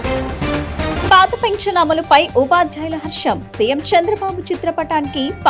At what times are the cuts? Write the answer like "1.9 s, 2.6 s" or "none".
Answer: 1.0 s